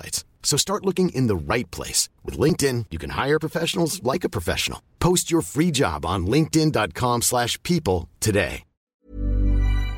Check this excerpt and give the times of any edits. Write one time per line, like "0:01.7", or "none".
0:08.9